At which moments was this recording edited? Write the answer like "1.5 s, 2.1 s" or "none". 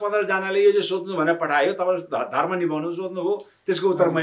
none